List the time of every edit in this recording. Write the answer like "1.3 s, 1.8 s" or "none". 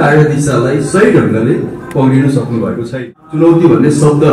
2.9 s

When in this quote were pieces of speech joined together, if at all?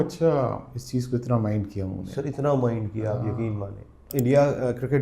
4.1 s

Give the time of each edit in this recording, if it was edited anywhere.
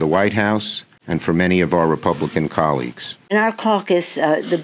3.3 s

